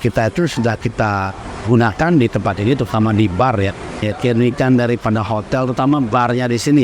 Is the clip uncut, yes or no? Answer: no